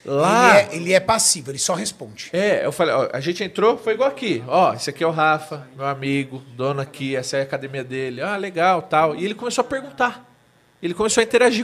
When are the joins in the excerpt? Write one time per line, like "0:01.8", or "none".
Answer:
none